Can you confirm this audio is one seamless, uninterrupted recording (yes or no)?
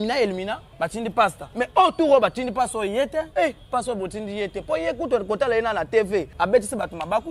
no